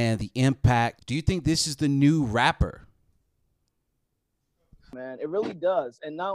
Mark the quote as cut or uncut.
cut